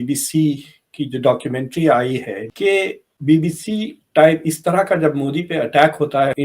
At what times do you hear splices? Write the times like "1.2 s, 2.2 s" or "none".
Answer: 2.4 s